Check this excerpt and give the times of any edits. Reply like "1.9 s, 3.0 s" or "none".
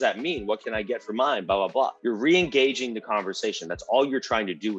2.0 s